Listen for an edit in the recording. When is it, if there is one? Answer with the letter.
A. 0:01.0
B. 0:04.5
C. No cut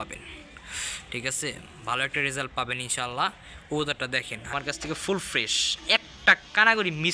B